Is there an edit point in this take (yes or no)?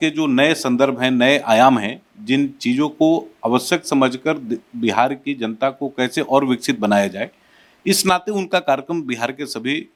no